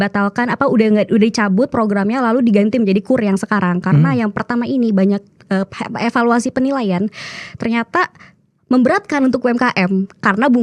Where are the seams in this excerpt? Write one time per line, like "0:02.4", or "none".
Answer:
none